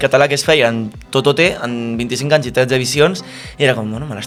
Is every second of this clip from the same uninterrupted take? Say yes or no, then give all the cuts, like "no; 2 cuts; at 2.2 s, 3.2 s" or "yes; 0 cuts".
yes; 0 cuts